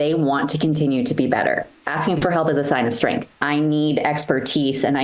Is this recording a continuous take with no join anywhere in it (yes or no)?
no